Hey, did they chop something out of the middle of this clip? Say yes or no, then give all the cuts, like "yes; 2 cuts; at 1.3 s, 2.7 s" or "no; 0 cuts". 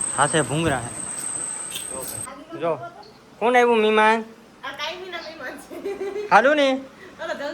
yes; 1 cut; at 2.4 s